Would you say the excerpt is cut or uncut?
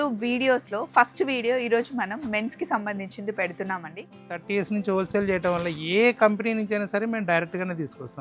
cut